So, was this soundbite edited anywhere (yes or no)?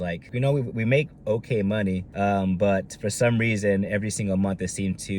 yes